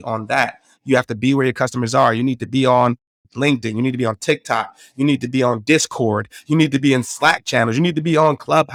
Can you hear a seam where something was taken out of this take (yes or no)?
no